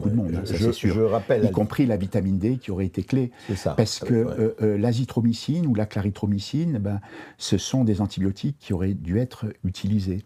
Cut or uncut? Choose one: uncut